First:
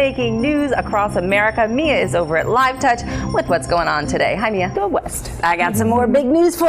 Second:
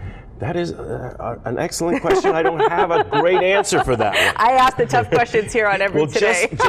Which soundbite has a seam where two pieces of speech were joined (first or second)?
first